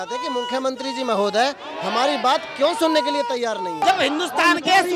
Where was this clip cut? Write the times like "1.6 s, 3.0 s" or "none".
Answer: 3.8 s

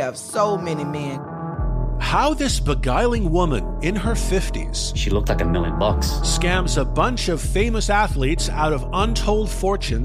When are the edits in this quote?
none

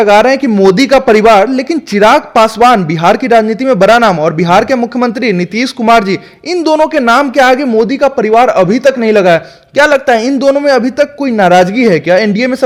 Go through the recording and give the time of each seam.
none

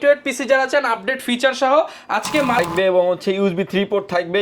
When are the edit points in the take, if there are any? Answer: 2.7 s

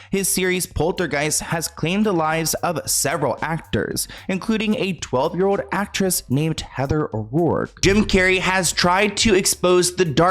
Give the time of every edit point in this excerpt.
7.7 s

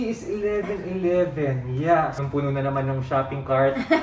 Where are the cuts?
2.2 s

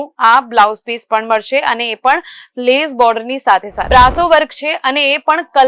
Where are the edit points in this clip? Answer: 3.8 s

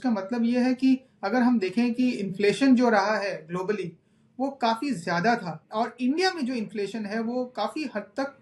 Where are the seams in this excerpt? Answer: 5.6 s

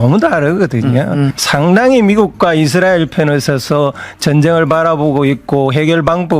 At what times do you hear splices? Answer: 1.4 s

